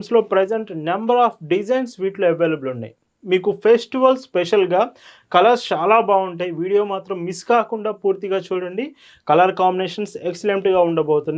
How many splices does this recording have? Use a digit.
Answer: 0